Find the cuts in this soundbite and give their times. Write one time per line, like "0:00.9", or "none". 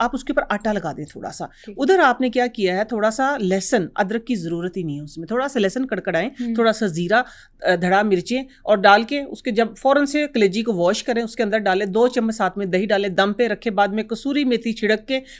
none